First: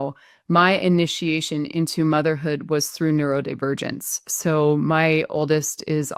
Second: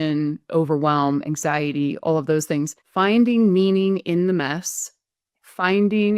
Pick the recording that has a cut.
second; 1 cut; at 2.8 s

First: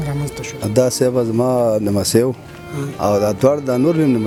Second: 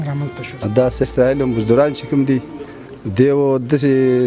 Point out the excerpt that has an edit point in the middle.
second; 1 cut; at 1.0 s

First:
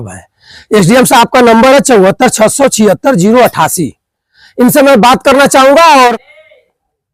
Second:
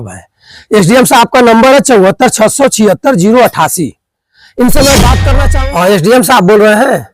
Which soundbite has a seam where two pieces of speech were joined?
second; 1 cut; at 5.4 s

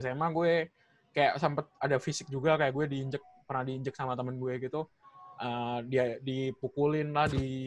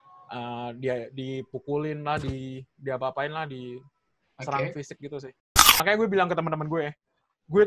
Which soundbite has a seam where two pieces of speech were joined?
second; 1 cut; at 5.8 s

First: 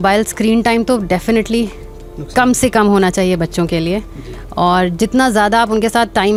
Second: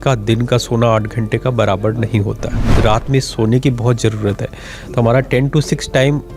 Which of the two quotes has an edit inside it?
second; 1 cut; at 2.7 s

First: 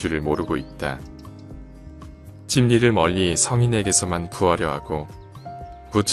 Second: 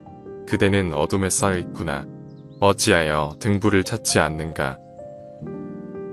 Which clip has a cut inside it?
second; 1 cut; at 5.1 s

